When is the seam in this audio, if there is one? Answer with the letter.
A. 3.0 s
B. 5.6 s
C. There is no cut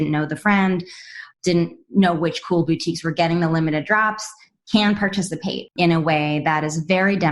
B